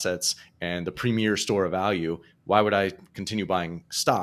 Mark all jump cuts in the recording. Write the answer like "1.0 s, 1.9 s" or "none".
none